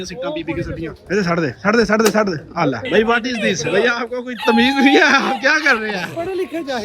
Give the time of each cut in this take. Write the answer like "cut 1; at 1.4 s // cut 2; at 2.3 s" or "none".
cut 1; at 1.0 s // cut 2; at 2.8 s